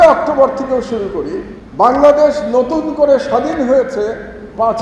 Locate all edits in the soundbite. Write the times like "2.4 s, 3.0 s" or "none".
1.6 s